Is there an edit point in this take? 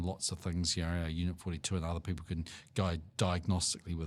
no; 0 cuts

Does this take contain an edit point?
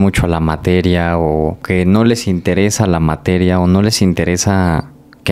yes; 1 cut; at 1.6 s

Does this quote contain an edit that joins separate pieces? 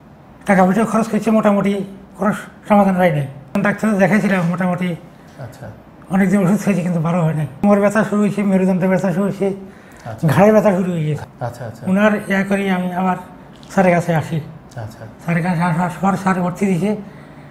yes; 3 cuts; at 3.6 s, 7.6 s, 11.2 s

